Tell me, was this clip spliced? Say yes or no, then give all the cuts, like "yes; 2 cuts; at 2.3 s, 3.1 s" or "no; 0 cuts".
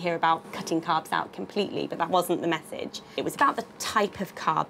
yes; 1 cut; at 3.4 s